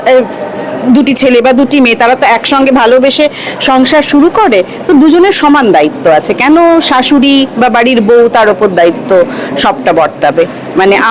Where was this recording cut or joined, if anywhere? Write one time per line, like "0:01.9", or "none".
none